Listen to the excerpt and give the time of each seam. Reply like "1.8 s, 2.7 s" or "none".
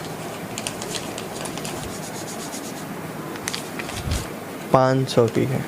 1.8 s, 4.2 s